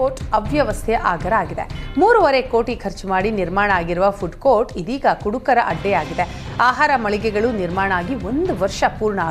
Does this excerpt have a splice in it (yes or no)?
no